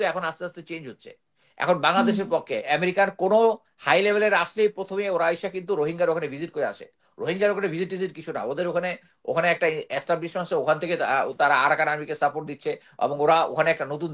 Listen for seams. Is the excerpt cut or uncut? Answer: cut